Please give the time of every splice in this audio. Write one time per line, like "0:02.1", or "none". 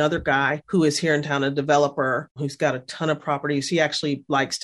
none